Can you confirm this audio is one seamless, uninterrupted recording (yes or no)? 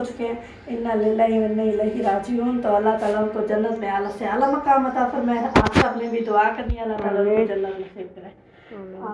yes